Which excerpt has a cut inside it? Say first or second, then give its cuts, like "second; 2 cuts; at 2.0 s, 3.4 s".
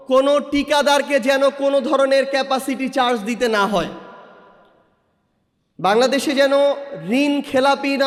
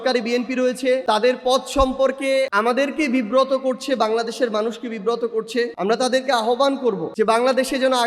second; 4 cuts; at 1.0 s, 2.5 s, 5.7 s, 7.1 s